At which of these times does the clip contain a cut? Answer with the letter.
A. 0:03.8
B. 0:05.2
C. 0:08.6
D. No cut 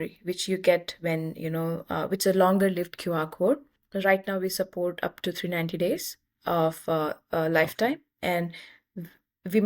A